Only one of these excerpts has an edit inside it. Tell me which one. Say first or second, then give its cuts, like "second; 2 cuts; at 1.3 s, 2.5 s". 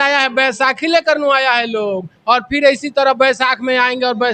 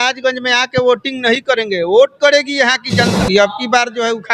second; 1 cut; at 3.2 s